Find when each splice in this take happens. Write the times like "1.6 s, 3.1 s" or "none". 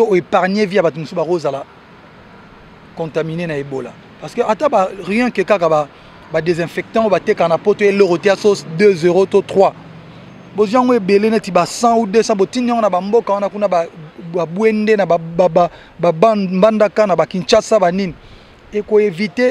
none